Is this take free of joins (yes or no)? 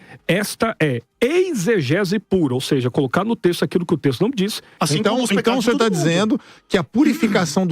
no